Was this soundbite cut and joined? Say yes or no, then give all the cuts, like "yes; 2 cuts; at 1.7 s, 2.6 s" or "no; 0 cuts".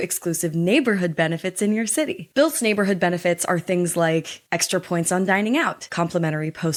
no; 0 cuts